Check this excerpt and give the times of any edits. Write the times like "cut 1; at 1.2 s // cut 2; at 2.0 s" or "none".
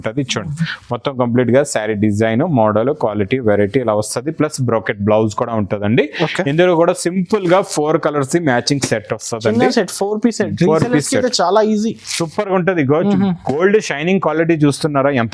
none